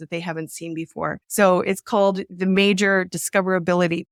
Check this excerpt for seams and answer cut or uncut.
uncut